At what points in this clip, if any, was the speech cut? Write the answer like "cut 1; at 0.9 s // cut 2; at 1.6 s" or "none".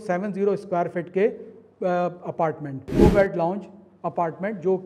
cut 1; at 2.8 s